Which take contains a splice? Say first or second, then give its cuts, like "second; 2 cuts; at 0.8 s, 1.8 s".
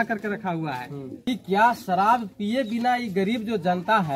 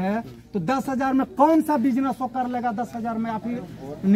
first; 1 cut; at 1.1 s